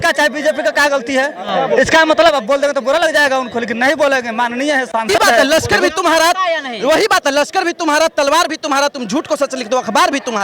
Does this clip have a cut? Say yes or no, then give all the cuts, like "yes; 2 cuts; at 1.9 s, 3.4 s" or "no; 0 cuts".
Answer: yes; 1 cut; at 5.4 s